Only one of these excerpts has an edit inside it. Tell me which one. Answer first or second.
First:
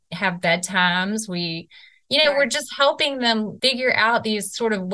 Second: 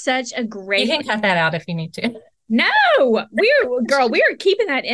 first